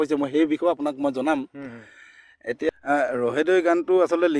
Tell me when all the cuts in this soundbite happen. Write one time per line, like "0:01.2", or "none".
0:02.8